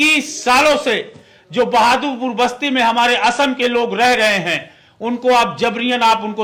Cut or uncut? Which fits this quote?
uncut